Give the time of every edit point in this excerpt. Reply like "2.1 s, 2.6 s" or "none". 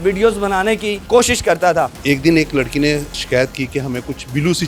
2.0 s, 3.2 s